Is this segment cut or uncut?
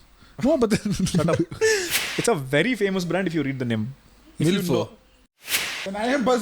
cut